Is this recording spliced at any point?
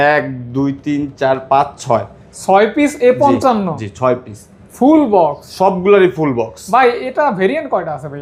no; 0 cuts

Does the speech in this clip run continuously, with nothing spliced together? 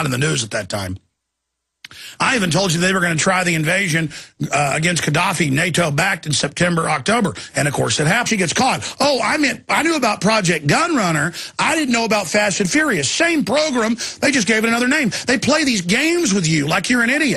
yes; 0 cuts

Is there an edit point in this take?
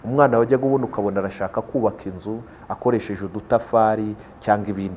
no; 0 cuts

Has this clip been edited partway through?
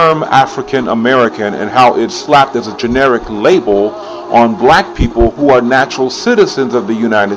no; 0 cuts

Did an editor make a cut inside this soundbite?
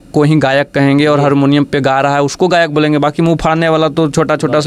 no; 0 cuts

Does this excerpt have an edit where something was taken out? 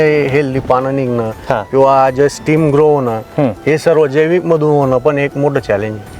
no; 0 cuts

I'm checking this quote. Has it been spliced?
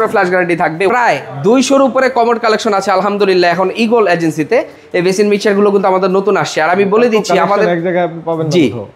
yes; 2 cuts; at 0.9 s, 4.8 s

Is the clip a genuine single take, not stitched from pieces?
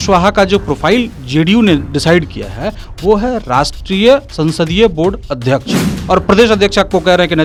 yes; 0 cuts

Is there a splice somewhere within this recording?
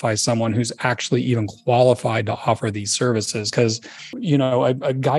yes; 1 cut; at 4.2 s

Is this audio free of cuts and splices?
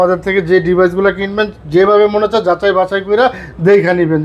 yes; 0 cuts

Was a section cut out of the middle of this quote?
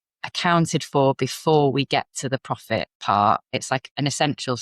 yes; 2 cuts; at 2.9 s, 3.7 s

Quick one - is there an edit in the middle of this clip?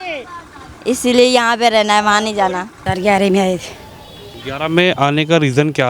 yes; 1 cut; at 2.8 s

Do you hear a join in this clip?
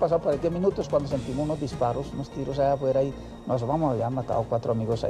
no; 0 cuts

